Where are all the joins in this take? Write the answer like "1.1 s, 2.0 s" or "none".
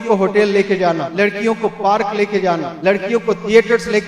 1.1 s, 2.7 s

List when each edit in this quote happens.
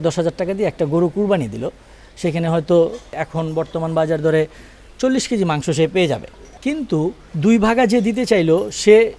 3.2 s, 6.5 s

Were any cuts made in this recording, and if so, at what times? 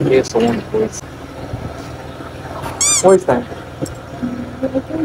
1.0 s

